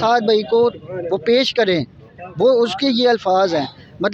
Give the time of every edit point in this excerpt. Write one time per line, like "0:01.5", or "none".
none